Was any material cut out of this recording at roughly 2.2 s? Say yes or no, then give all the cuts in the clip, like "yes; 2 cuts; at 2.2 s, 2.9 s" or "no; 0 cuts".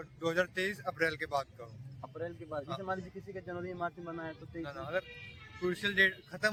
no; 0 cuts